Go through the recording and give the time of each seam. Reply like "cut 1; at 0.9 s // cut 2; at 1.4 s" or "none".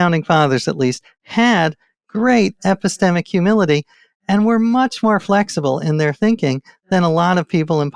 none